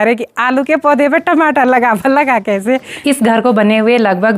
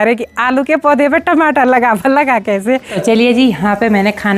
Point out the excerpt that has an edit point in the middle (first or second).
first